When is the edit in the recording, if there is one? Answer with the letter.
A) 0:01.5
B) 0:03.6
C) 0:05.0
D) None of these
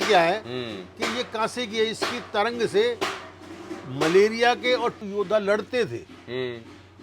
C